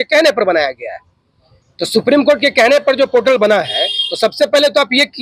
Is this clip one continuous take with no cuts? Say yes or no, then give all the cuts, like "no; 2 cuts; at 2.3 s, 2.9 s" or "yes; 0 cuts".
yes; 0 cuts